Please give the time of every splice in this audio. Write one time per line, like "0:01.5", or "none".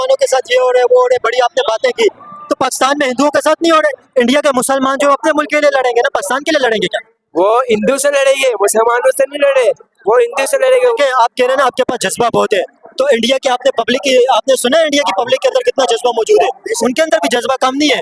0:04.0
0:10.9

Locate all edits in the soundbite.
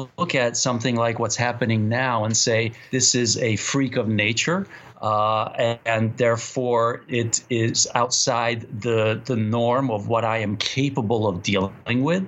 none

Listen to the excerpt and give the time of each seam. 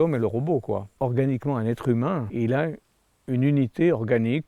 0:01.0
0:02.3

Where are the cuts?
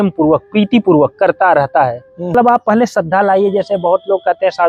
0:02.3

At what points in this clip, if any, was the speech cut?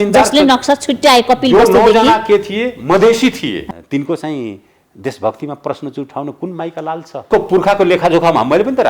0:03.7
0:07.3

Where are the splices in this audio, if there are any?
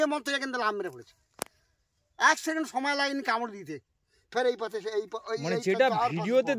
none

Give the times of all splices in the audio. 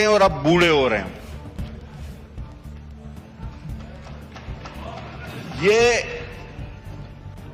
none

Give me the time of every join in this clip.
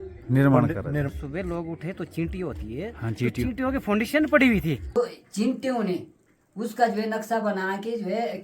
0:01.2
0:04.9

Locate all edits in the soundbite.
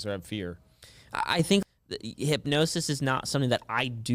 0:01.6

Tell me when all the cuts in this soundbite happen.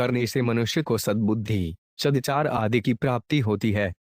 0:02.2

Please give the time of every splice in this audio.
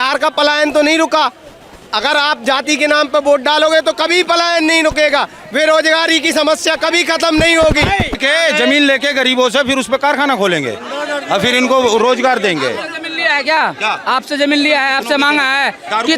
0:08.2

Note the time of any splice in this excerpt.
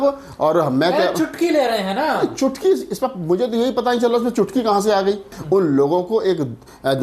0:05.4

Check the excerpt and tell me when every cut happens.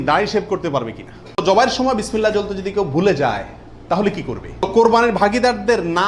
0:01.4
0:04.7

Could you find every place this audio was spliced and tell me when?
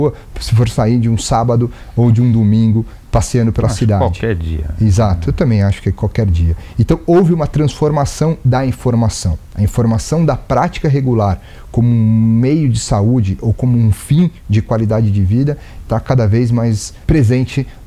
0:16.9

